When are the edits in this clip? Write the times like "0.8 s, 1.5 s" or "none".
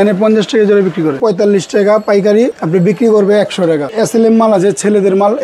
1.2 s, 2.6 s, 3.9 s